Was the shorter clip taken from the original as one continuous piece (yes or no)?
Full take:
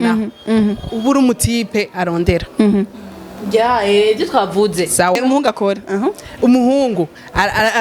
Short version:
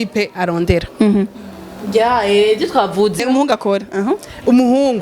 no